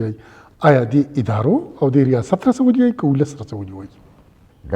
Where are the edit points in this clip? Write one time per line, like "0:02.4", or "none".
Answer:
none